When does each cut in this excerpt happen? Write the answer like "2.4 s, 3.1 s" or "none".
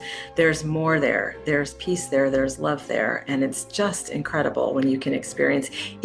none

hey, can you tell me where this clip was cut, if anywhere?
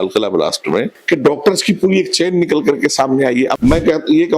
1.0 s, 3.5 s

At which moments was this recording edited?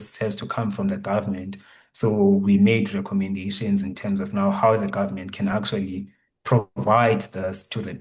none

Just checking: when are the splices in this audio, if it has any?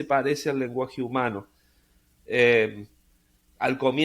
none

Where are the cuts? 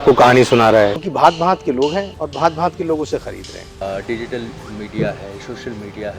1.0 s, 2.2 s, 3.8 s

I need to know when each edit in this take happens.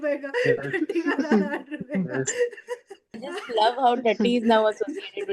3.2 s

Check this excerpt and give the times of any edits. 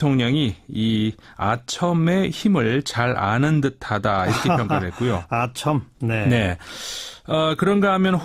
3.1 s

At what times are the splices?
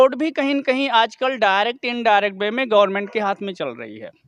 none

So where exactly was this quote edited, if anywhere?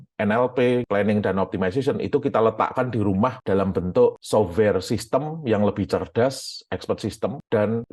none

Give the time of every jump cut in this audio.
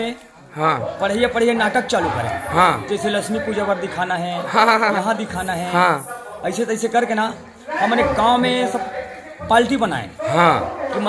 none

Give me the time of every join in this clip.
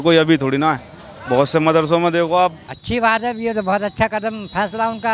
2.7 s

